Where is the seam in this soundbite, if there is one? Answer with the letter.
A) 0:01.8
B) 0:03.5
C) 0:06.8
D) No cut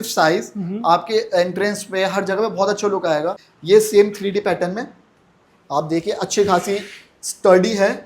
B